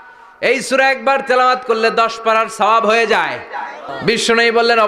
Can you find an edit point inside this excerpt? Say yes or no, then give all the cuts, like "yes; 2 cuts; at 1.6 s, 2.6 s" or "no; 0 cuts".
yes; 1 cut; at 3.8 s